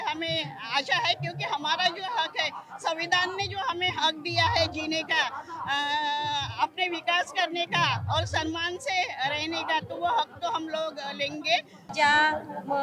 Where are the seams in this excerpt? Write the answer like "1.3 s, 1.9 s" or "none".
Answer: 11.9 s